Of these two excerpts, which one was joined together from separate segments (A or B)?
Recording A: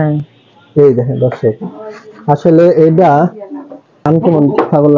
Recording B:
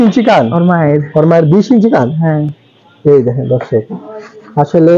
A